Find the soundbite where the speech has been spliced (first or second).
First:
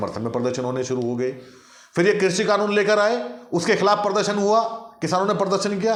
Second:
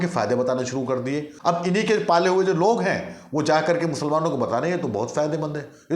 second